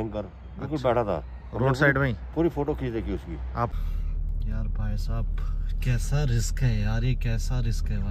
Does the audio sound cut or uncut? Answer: cut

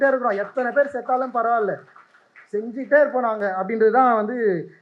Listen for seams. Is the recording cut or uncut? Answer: uncut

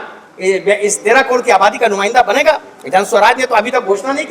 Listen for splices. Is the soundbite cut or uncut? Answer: uncut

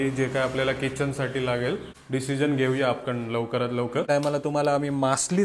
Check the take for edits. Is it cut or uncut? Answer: cut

